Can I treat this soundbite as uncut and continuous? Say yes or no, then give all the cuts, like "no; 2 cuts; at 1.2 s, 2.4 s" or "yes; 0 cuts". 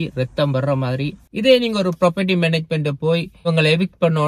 no; 2 cuts; at 1.2 s, 3.5 s